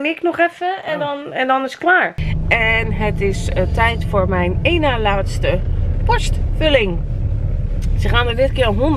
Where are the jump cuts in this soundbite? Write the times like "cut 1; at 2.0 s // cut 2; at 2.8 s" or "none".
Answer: cut 1; at 2.2 s